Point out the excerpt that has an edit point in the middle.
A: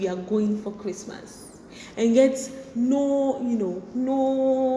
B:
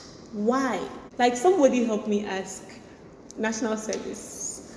B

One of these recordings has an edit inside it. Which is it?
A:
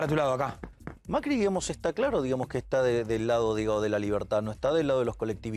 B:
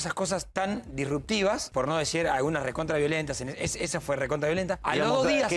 B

